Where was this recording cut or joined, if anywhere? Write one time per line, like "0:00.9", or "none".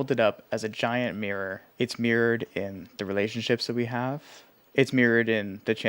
0:01.6